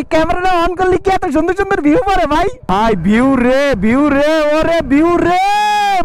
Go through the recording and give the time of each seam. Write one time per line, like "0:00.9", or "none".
0:02.6